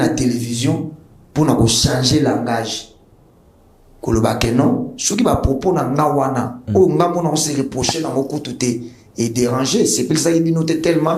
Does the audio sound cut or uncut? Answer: uncut